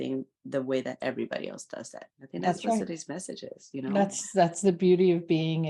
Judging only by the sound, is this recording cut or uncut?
uncut